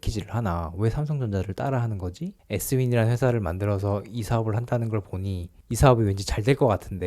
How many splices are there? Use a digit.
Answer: 1